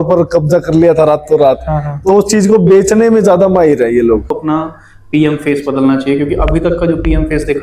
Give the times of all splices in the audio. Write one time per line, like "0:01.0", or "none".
0:04.3